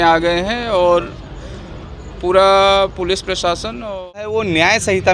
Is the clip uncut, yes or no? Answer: no